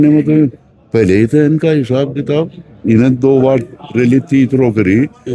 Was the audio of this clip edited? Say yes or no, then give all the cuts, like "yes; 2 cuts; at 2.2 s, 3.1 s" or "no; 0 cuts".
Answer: no; 0 cuts